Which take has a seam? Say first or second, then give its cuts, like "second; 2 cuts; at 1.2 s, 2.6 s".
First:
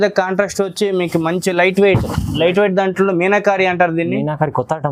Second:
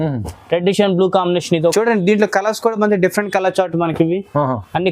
second; 1 cut; at 1.7 s